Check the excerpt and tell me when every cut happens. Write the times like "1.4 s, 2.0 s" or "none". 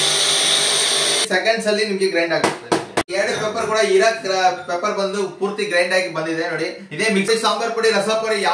1.3 s, 3.1 s, 7.3 s